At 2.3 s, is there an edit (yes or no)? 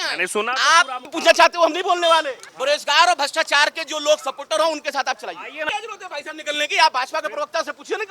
yes